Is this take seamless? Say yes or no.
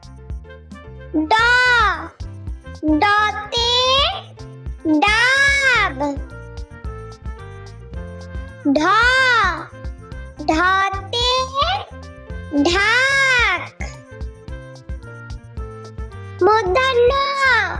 no